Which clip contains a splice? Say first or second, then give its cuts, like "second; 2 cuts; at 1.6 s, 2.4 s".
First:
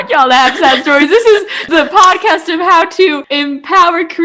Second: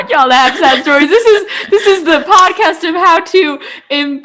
first; 2 cuts; at 1.6 s, 3.2 s